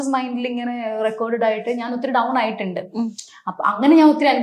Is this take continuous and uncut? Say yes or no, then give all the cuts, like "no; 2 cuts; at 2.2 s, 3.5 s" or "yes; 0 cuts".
yes; 0 cuts